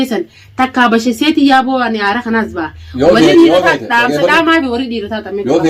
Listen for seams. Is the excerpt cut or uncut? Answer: uncut